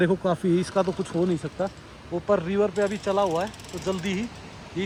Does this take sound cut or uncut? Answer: uncut